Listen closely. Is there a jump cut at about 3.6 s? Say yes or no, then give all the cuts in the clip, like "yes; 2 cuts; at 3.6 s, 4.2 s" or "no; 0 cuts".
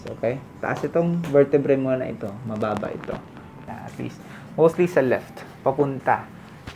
yes; 1 cut; at 3.6 s